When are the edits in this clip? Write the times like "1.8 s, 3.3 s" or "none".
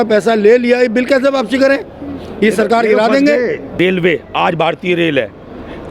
3.7 s